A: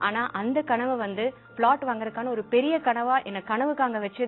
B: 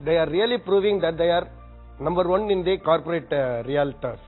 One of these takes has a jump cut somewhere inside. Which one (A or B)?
A